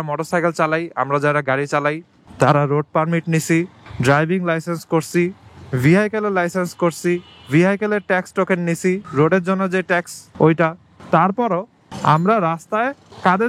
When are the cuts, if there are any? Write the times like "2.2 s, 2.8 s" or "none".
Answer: none